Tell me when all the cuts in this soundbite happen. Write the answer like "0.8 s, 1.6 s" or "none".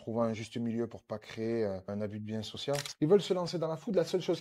2.9 s